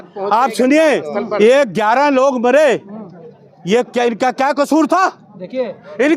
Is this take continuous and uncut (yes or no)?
yes